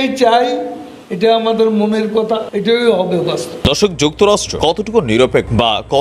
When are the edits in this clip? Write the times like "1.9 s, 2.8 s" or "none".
2.5 s, 3.6 s